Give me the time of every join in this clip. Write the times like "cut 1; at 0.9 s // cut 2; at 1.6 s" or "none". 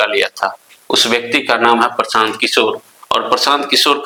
none